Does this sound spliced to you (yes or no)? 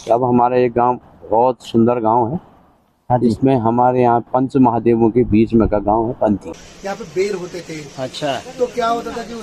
yes